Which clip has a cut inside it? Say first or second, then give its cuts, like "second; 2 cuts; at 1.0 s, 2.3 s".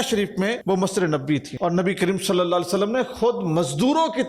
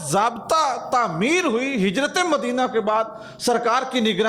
first; 1 cut; at 1.5 s